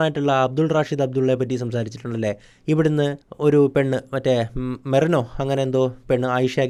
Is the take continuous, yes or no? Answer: yes